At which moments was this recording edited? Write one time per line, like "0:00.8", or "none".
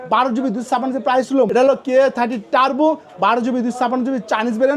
0:01.5